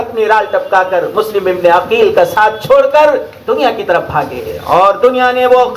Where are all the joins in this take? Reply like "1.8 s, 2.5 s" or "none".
none